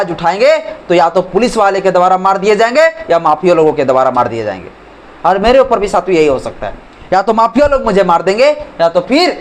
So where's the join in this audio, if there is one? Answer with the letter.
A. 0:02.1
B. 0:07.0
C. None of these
C